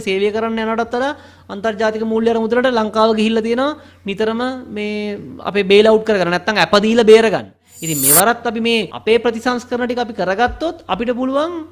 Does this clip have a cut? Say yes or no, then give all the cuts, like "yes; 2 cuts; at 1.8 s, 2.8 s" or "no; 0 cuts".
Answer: yes; 2 cuts; at 7.7 s, 8.9 s